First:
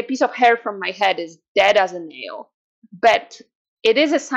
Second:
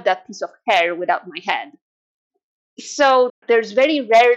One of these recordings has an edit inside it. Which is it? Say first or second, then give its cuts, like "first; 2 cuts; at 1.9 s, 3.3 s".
second; 1 cut; at 3.4 s